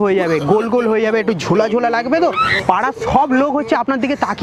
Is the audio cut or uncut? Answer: uncut